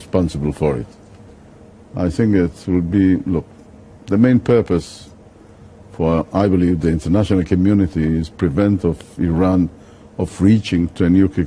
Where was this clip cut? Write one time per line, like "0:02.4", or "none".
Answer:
0:09.3